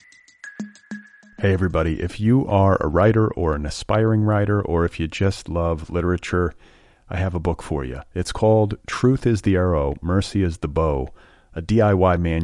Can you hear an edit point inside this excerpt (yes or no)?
yes